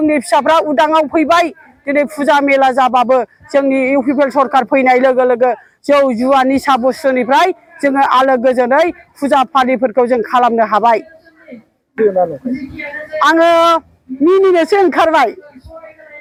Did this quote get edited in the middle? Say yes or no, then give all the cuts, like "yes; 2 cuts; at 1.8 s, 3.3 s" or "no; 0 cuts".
no; 0 cuts